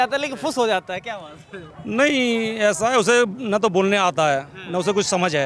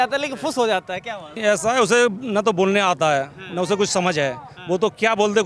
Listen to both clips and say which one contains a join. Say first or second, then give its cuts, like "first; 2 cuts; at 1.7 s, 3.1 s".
second; 1 cut; at 1.4 s